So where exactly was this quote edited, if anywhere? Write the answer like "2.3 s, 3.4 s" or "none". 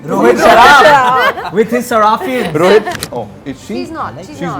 2.9 s